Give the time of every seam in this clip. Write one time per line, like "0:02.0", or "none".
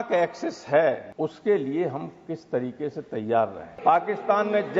0:01.1
0:03.7

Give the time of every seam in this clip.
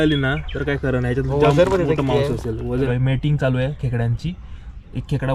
0:02.9

